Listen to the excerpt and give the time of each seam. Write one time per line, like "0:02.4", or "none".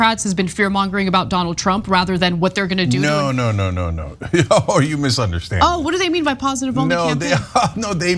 0:03.7